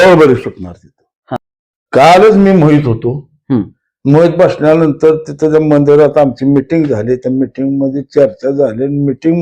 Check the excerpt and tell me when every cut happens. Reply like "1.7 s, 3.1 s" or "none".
1.4 s